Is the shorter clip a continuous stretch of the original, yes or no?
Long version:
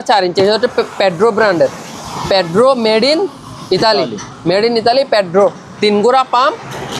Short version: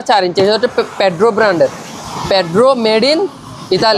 yes